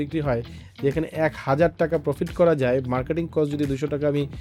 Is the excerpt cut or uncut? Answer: uncut